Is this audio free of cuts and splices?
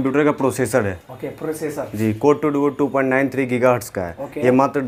yes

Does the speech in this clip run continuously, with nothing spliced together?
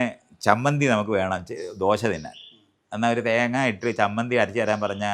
yes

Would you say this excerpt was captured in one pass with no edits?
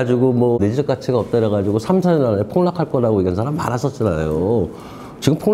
yes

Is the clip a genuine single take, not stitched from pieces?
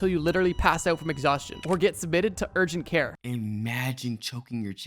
no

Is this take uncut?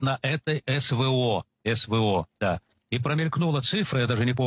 yes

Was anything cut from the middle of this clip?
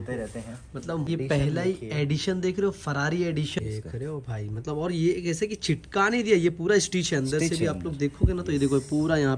yes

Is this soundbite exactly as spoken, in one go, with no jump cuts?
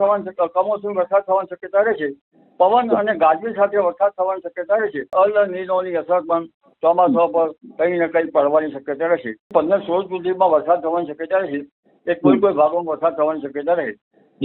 no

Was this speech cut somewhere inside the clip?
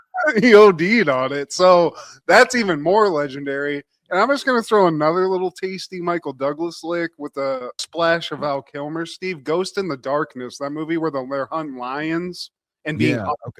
no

